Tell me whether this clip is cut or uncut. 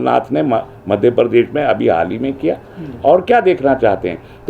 uncut